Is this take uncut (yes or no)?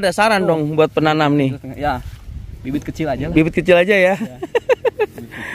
yes